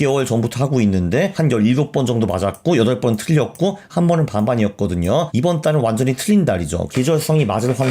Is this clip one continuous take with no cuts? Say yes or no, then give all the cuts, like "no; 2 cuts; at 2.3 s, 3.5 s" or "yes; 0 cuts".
no; 3 cuts; at 1.3 s, 5.3 s, 6.8 s